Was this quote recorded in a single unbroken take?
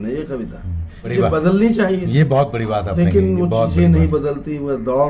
no; 1 cut; at 1.1 s

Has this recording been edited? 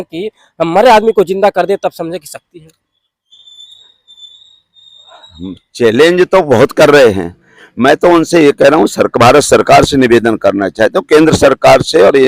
no; 0 cuts

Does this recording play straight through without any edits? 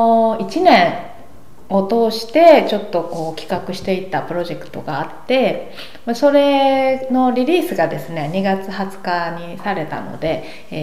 yes; 0 cuts

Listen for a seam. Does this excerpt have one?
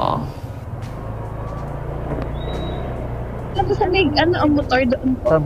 yes; 1 cut; at 3.5 s

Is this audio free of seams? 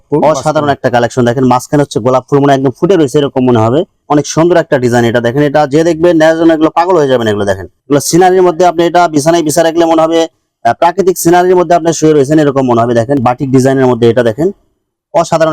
no; 3 cuts; at 4.0 s, 7.7 s, 13.2 s

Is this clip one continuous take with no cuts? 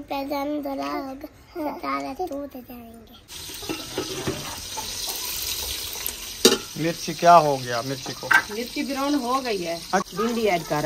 no; 2 cuts; at 3.4 s, 10.1 s

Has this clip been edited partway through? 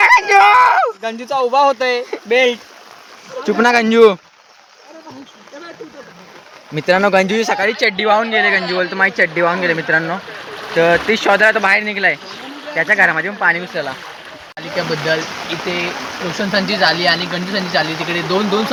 no; 0 cuts

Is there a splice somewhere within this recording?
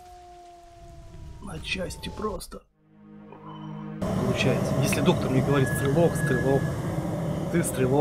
yes; 1 cut; at 4.0 s

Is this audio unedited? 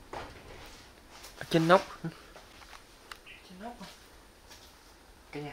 yes; 0 cuts

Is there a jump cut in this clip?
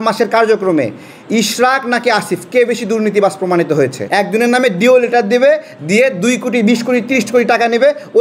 yes; 1 cut; at 4.0 s

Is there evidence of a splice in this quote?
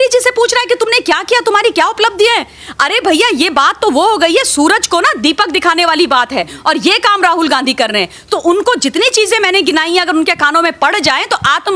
no; 0 cuts

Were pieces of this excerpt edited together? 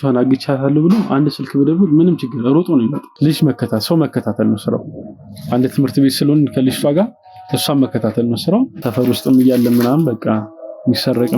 yes; 2 cuts; at 3.0 s, 8.8 s

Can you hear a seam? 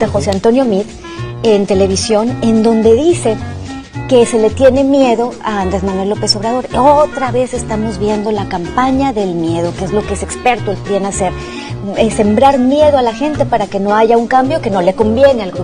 no; 0 cuts

